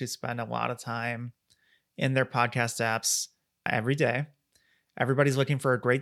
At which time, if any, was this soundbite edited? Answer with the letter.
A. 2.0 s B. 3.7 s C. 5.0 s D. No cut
B